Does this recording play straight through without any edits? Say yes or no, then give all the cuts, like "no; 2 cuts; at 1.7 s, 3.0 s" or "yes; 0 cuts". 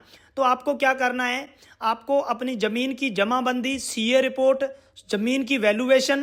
yes; 0 cuts